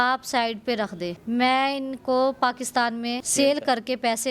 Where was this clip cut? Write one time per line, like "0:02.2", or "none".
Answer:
0:03.2

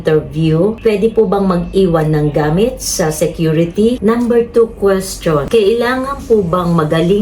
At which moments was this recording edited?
0:00.8
0:04.0
0:05.4

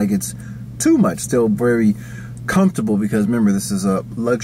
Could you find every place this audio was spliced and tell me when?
0:01.2

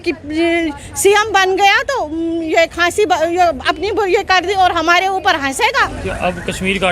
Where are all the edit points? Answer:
0:05.7

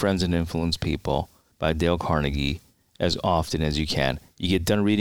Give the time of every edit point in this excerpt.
0:01.4

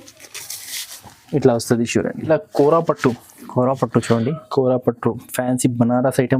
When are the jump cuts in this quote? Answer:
0:02.2

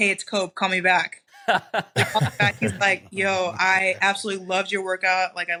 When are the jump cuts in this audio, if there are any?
none

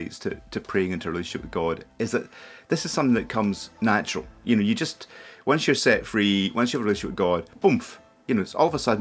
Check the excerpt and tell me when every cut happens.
none

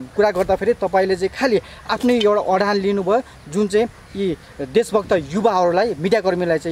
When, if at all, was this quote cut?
none

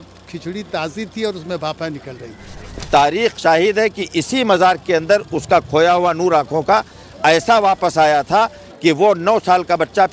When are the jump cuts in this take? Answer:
0:02.9

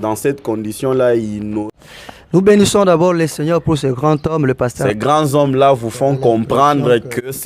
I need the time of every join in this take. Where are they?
0:01.6
0:04.8

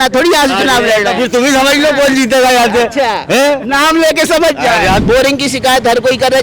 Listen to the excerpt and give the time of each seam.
0:05.0

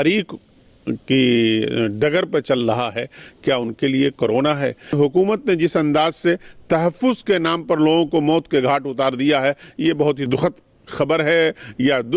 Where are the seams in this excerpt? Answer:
0:04.9
0:10.3

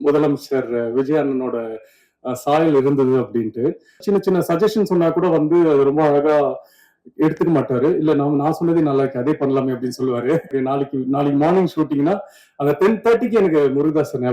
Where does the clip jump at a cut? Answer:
0:04.0
0:10.5

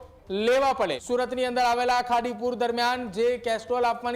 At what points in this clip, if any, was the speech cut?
0:01.0

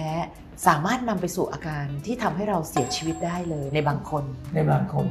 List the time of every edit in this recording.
none

